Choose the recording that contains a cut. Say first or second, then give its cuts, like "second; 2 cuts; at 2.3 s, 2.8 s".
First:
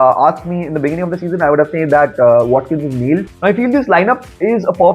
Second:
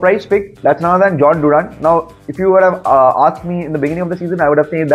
first; 1 cut; at 3.3 s